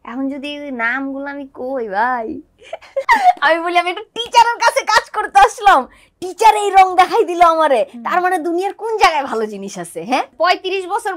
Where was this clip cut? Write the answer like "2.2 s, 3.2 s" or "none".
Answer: 3.0 s, 10.3 s